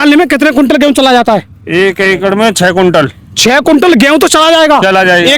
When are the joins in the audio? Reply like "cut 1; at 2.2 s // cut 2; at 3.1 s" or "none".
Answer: none